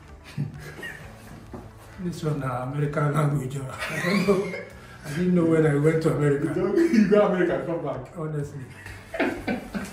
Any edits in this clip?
yes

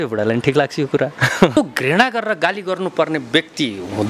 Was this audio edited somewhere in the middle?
yes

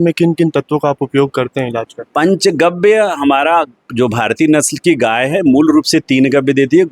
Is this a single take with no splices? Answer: yes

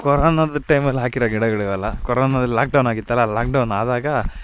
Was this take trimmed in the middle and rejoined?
no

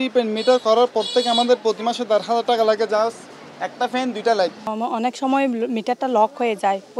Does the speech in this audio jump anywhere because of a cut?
yes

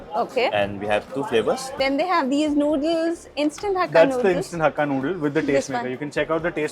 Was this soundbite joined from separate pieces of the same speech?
yes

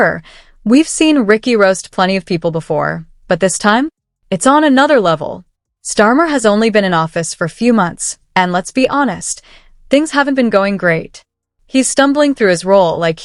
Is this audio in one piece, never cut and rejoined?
yes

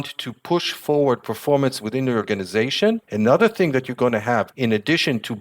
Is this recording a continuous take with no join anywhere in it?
no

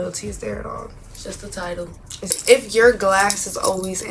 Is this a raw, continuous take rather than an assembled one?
no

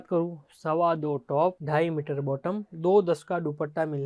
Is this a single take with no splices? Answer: yes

